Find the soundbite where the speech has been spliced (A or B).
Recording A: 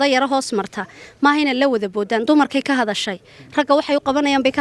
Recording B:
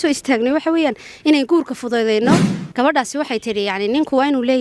B